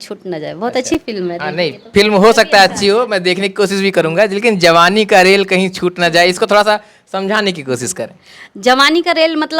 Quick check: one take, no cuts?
yes; 0 cuts

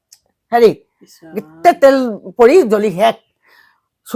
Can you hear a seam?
no; 0 cuts

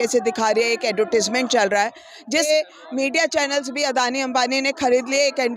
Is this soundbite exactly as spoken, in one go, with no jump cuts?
no; 1 cut; at 2.5 s

